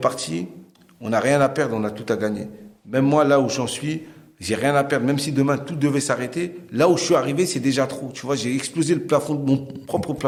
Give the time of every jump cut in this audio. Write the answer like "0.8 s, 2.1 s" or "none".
none

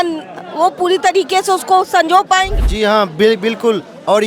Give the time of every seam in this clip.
2.6 s

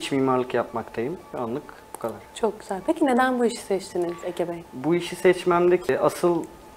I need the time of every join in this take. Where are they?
none

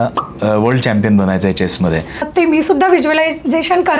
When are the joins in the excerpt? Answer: 2.3 s

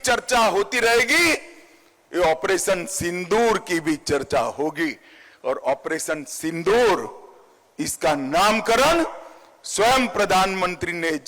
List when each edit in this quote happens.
none

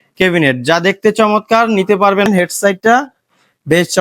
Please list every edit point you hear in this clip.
2.3 s

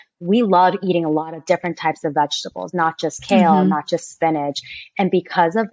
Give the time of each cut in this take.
none

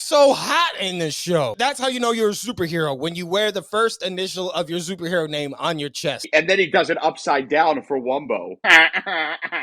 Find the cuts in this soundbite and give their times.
1.5 s, 6.2 s, 8.5 s

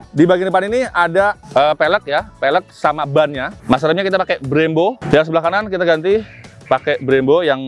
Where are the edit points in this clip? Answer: 3.6 s

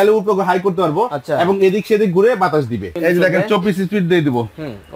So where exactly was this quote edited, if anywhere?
2.9 s

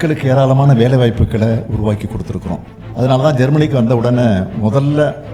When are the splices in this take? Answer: 2.7 s

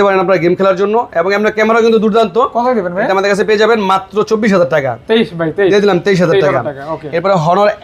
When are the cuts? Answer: none

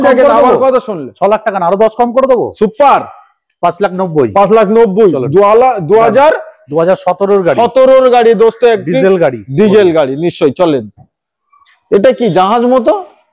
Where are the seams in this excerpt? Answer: none

